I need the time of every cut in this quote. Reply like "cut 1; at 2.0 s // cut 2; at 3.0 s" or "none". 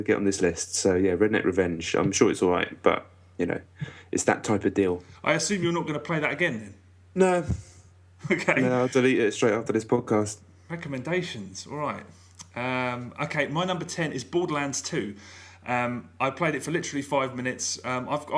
cut 1; at 1.6 s

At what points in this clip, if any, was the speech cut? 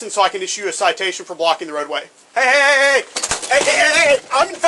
cut 1; at 2.2 s

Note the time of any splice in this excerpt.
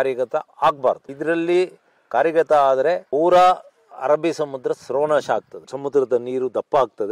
cut 1; at 1.1 s // cut 2; at 5.6 s

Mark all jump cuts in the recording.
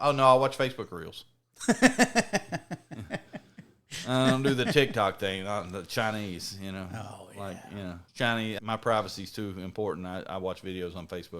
cut 1; at 8.6 s

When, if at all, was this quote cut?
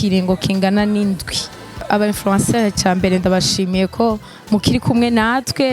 cut 1; at 1.8 s

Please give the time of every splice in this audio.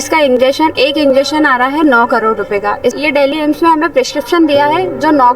cut 1; at 3.0 s

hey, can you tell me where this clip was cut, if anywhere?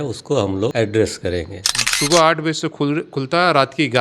cut 1; at 1.9 s

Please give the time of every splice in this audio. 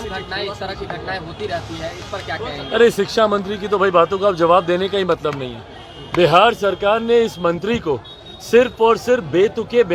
none

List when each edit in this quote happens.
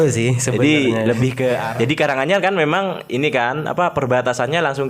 cut 1; at 1.6 s

